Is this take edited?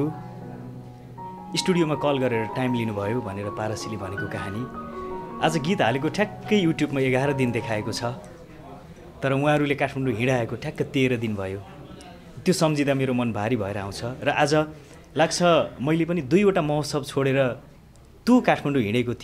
no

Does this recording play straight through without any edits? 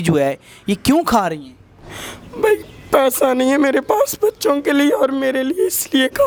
yes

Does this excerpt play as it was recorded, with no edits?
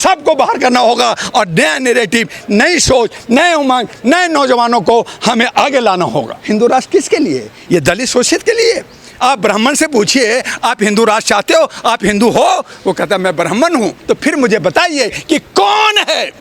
no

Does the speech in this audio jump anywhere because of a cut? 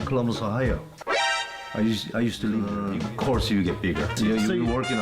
yes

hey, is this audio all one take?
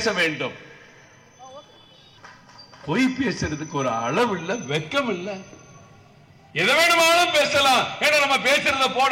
no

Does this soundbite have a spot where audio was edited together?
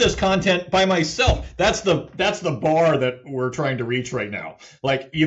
no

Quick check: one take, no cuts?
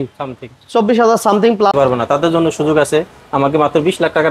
no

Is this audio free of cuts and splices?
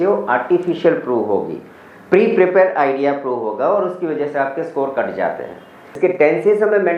no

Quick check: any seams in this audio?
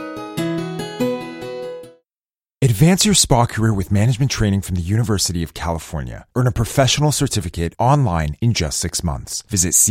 yes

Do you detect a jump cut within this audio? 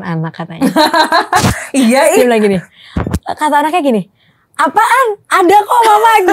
no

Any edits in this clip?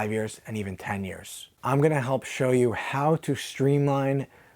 yes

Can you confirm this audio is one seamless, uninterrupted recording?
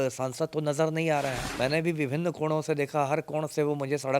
no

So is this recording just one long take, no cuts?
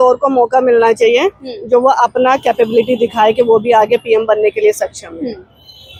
yes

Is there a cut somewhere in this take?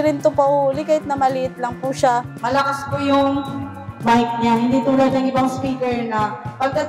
yes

